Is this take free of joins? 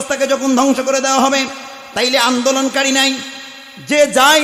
yes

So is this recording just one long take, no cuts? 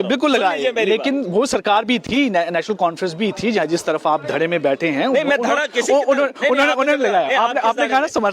yes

